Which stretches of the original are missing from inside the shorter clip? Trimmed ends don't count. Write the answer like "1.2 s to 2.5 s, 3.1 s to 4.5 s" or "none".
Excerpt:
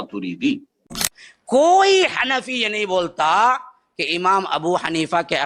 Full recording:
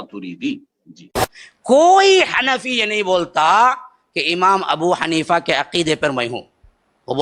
1.1 s to 1.3 s